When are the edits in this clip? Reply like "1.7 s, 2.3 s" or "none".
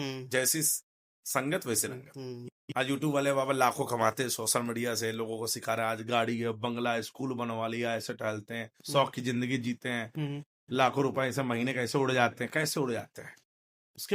2.5 s

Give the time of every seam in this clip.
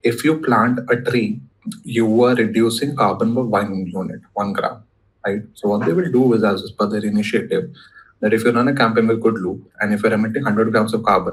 none

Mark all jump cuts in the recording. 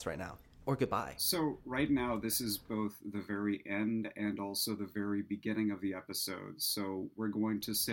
1.2 s

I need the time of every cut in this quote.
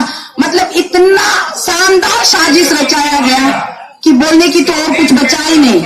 none

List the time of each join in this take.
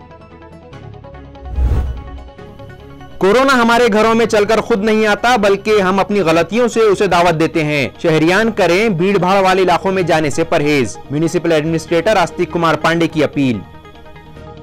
1.7 s

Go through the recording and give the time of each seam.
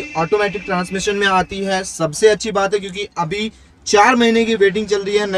none

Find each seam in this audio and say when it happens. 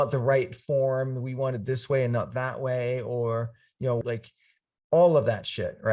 4.0 s

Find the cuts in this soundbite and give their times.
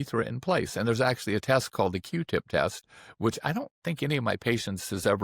none

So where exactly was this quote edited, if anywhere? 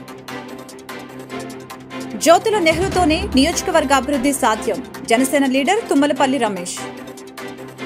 1.0 s, 2.0 s

